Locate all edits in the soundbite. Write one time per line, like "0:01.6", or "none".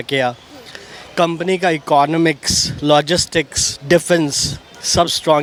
none